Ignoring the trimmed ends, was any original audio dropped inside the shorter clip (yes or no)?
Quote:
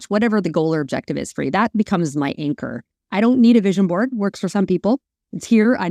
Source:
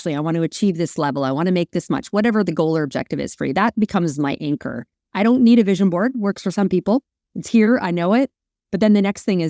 no